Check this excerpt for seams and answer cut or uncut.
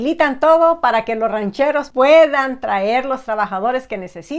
uncut